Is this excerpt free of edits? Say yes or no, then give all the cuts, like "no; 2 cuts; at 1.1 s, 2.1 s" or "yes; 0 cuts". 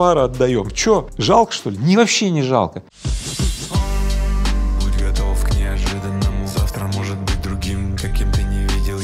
no; 2 cuts; at 1.1 s, 2.9 s